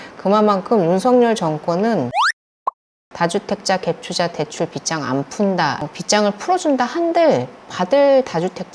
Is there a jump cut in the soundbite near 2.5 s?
yes; 1 cut; at 2.5 s

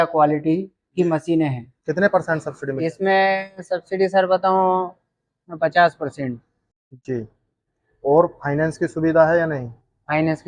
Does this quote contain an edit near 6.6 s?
no; 1 cut; at 1.7 s

